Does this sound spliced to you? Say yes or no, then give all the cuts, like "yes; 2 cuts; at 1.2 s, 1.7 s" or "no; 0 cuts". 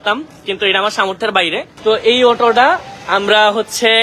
yes; 1 cut; at 1.7 s